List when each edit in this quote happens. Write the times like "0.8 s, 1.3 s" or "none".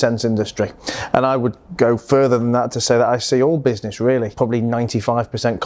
4.3 s